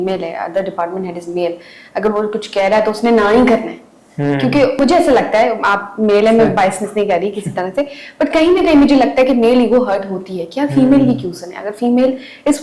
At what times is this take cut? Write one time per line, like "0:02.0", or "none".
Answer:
0:04.8